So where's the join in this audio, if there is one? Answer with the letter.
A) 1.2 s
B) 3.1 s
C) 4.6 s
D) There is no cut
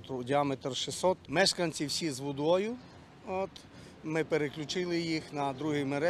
A